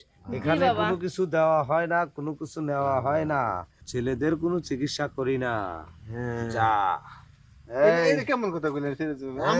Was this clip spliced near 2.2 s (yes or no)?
no